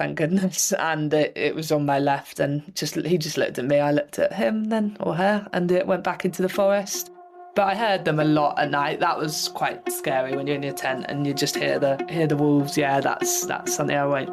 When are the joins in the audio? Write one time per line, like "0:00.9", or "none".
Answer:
none